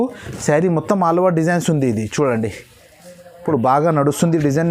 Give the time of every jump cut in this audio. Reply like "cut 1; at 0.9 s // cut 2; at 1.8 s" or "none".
cut 1; at 3.3 s